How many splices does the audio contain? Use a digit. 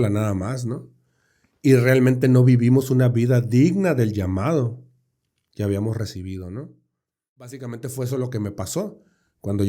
1